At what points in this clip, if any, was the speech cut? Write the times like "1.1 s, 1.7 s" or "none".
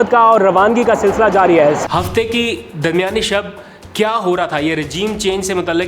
1.8 s